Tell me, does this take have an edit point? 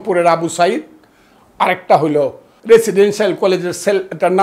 yes; 1 cut; at 2.5 s

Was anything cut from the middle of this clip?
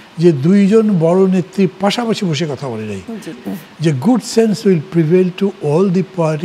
yes; 1 cut; at 3.4 s

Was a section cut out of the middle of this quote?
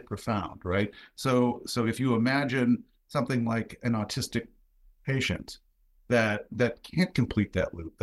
no; 0 cuts

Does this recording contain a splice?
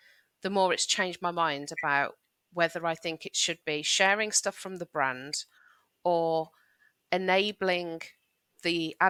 no; 0 cuts

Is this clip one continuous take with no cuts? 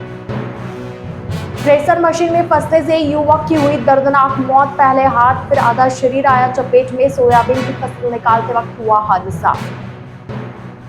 no; 1 cut; at 1.5 s

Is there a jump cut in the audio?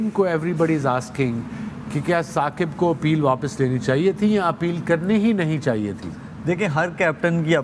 no; 0 cuts

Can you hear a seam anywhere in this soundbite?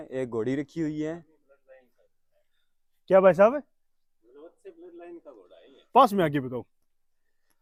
no; 0 cuts

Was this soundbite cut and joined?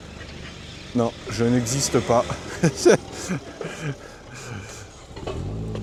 no; 0 cuts

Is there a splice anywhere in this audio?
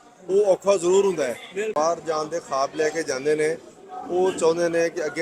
yes; 1 cut; at 1.7 s

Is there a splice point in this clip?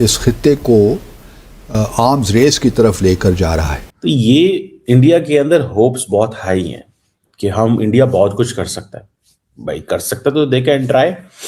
yes; 1 cut; at 3.8 s

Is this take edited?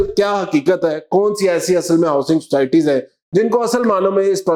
no; 0 cuts

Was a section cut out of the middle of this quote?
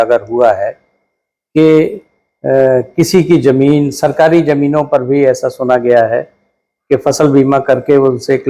no; 0 cuts

